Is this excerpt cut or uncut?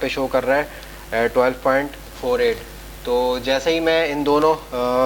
uncut